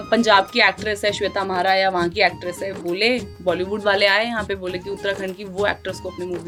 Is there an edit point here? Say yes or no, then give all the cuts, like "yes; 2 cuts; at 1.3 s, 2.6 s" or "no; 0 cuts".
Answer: no; 0 cuts